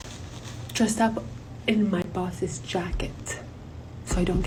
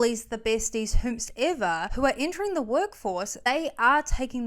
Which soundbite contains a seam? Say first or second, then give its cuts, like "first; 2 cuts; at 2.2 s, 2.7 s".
second; 2 cuts; at 1.9 s, 3.4 s